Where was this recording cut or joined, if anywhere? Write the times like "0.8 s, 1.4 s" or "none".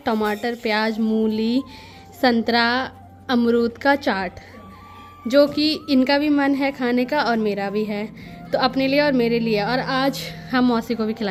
none